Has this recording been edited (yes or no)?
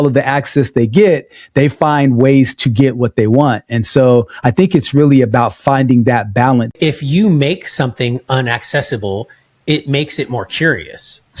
yes